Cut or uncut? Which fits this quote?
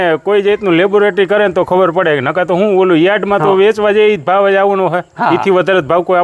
uncut